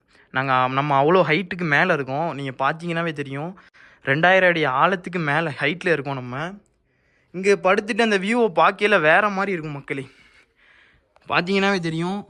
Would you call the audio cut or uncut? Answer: uncut